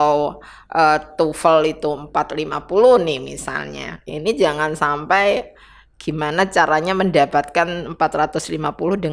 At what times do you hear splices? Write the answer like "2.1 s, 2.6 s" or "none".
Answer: 4.0 s